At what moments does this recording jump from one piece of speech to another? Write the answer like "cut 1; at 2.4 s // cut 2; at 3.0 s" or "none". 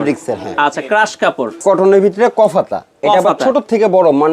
cut 1; at 1.6 s